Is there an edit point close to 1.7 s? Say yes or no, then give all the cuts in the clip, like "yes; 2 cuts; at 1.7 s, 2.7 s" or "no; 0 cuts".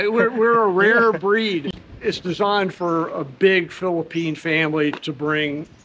yes; 1 cut; at 1.7 s